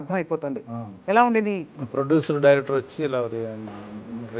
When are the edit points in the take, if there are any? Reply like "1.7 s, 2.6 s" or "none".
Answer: 1.7 s